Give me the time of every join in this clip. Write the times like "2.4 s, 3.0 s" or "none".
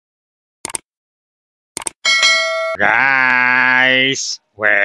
2.7 s

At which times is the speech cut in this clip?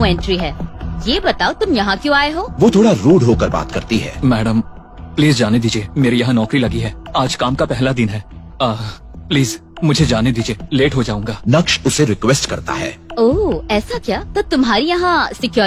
none

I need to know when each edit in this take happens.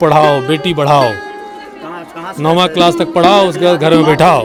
none

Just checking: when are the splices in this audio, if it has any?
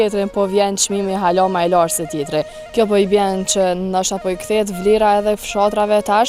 none

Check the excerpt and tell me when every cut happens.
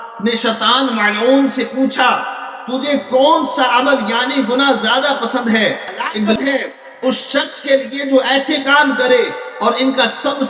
6.4 s

